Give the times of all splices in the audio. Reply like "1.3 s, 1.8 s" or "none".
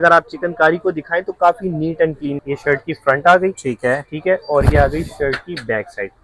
2.4 s